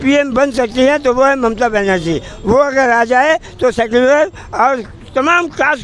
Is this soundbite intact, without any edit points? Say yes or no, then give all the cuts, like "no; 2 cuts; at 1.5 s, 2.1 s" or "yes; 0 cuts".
yes; 0 cuts